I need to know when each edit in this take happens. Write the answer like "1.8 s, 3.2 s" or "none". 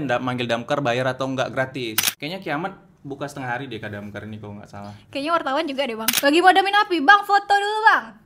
2.0 s, 6.1 s